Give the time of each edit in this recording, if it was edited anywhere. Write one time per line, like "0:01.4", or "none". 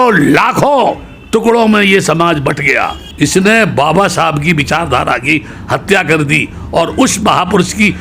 0:03.0